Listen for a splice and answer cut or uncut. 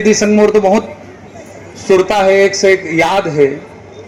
uncut